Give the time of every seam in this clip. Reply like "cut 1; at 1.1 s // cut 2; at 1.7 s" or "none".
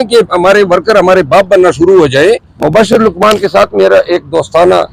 cut 1; at 2.5 s

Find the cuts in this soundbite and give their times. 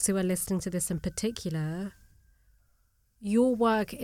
none

